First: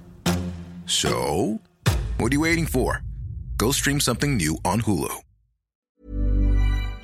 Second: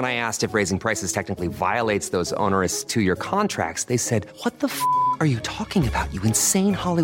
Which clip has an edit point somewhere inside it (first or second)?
first